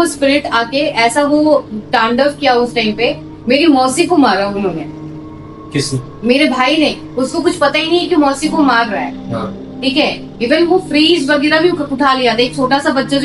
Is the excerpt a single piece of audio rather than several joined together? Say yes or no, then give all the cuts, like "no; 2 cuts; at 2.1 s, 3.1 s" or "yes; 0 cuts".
yes; 0 cuts